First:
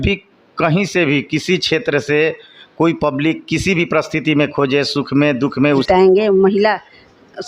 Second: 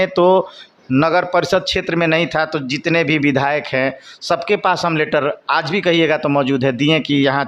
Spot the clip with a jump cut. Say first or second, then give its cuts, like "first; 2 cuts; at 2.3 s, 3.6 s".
first; 1 cut; at 5.8 s